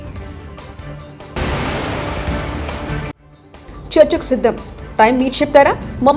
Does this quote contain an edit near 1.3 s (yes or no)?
yes